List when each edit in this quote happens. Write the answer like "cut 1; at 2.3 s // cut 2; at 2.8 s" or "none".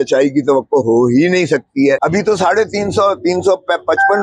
cut 1; at 2.0 s